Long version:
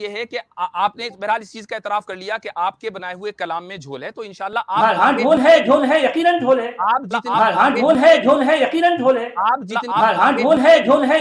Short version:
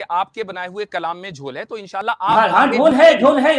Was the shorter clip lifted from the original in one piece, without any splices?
no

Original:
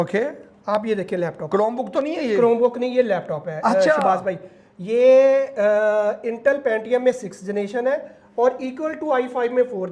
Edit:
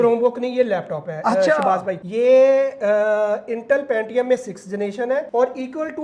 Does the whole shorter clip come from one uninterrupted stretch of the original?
no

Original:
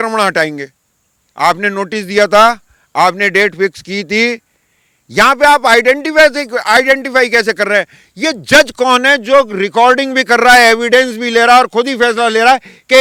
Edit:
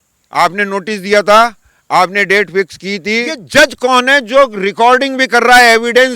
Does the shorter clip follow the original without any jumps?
no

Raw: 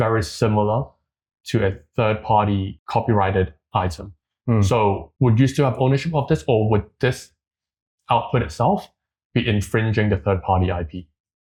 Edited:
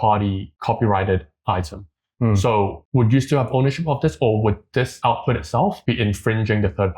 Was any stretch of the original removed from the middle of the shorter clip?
yes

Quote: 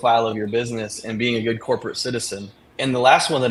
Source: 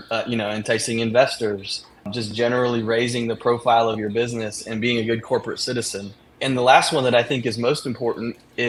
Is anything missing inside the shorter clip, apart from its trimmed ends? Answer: no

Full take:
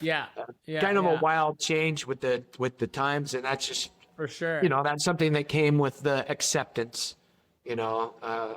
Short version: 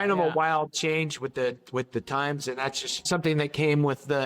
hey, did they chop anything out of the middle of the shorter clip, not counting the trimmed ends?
yes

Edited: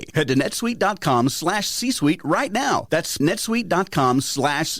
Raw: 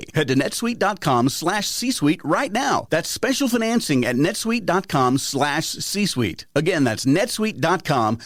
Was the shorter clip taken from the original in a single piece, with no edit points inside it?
no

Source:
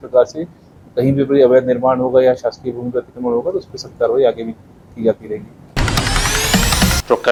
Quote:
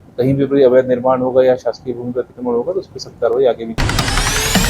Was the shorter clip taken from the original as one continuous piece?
no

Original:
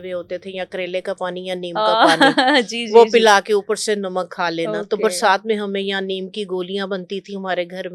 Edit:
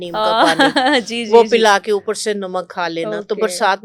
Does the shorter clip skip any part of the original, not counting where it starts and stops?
no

